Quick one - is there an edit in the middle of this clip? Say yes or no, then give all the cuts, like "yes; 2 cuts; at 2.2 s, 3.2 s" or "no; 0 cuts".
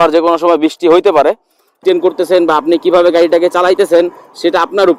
yes; 1 cut; at 1.8 s